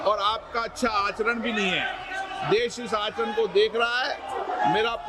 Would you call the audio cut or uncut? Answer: uncut